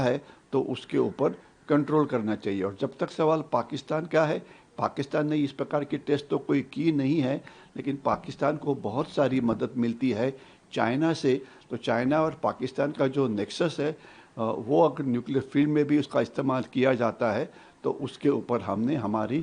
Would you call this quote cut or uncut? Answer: uncut